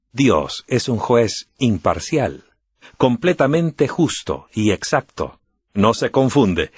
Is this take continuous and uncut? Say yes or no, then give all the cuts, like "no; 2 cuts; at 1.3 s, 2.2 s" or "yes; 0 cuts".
no; 1 cut; at 3.2 s